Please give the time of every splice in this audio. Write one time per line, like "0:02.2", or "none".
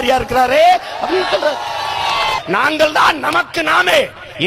0:02.4